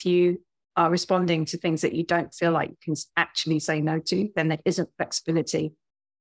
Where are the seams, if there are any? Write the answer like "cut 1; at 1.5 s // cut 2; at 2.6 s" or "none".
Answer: none